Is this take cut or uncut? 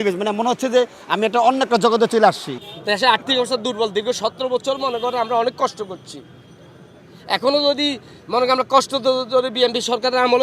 uncut